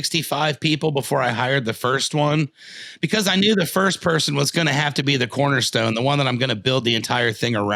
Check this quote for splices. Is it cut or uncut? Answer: uncut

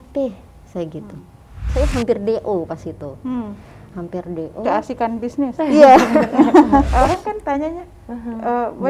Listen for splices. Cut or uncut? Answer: cut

